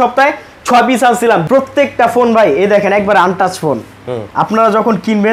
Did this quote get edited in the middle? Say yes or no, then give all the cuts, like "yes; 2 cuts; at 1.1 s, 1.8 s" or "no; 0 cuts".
yes; 1 cut; at 1.4 s